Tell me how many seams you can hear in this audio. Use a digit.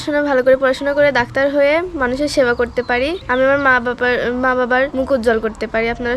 2